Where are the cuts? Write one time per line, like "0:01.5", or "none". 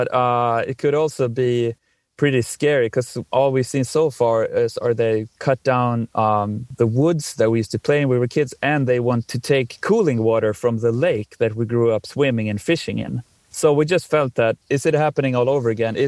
0:06.7
0:09.3
0:13.4
0:14.6